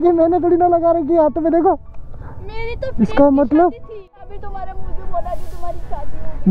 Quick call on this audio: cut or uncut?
cut